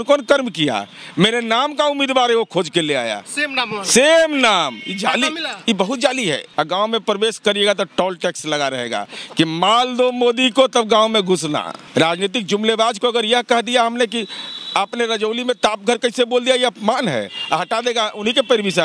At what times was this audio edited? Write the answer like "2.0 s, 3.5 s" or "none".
6.4 s, 11.8 s